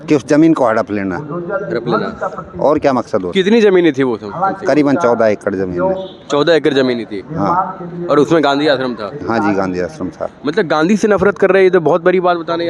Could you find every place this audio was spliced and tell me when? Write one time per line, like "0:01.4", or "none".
none